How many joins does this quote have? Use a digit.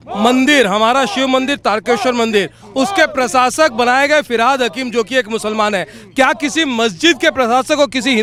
0